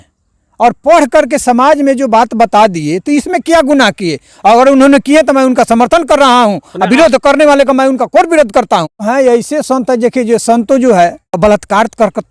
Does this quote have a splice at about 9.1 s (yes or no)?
yes